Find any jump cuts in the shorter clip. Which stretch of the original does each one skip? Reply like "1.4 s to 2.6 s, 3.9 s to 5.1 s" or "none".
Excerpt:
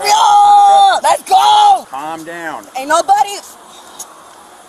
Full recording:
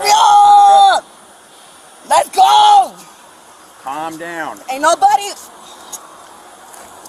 1.0 s to 2.1 s, 3.0 s to 3.9 s

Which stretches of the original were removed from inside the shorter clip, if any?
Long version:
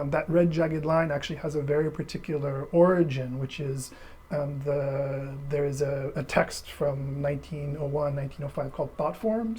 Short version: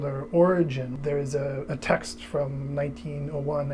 3.3 s to 5.4 s

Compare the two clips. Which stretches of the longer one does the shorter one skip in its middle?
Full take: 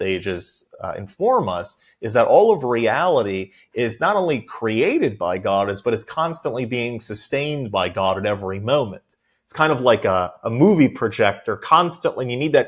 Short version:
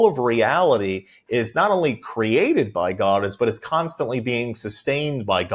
none

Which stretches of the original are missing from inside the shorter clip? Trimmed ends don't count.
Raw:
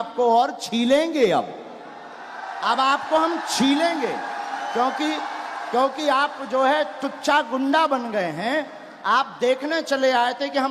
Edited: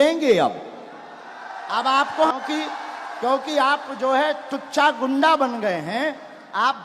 3.3 s to 4.8 s

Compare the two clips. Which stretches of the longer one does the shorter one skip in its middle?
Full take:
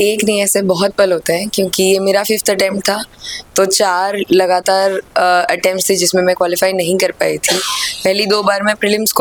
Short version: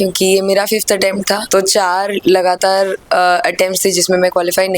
3.0 s to 3.5 s

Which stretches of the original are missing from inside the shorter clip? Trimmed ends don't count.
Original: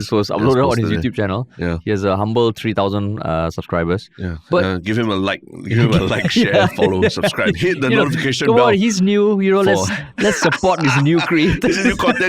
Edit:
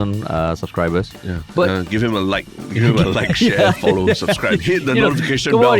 none

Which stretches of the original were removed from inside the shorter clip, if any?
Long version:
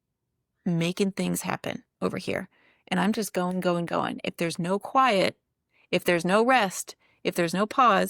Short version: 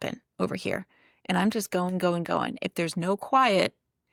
none

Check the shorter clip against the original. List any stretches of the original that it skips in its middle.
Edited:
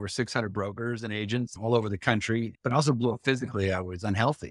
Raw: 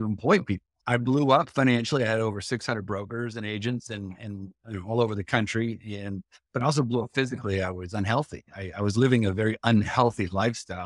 3.9 s to 4.8 s, 5.8 s to 6.4 s

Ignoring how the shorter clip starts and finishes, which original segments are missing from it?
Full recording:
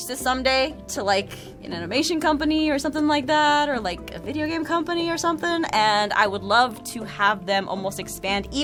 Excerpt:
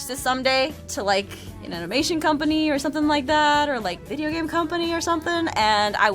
4.0 s to 4.2 s

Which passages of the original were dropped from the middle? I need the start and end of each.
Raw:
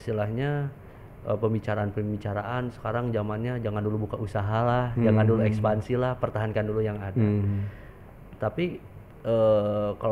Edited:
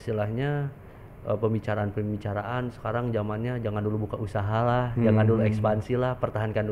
none

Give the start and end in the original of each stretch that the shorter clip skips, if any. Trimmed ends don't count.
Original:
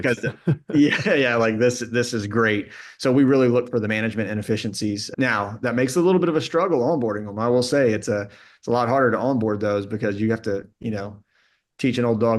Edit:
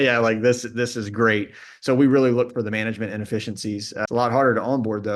5.0 s to 8.4 s

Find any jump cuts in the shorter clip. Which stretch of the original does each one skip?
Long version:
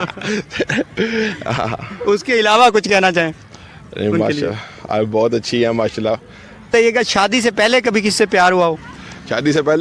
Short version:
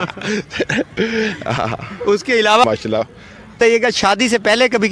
2.6 s to 5.8 s

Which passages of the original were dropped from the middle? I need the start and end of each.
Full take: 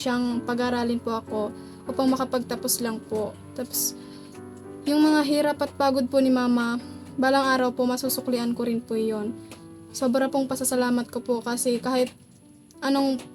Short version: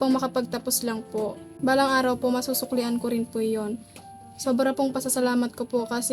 3.4 s to 7.0 s

